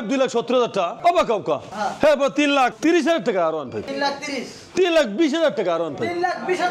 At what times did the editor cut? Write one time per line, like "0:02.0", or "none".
0:01.7